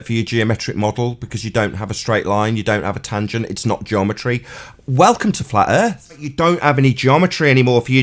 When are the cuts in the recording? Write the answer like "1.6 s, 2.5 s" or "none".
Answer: 6.3 s